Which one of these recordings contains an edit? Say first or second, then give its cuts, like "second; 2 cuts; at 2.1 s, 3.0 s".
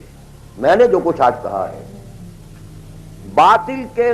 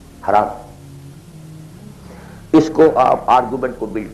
first; 2 cuts; at 1.9 s, 3.3 s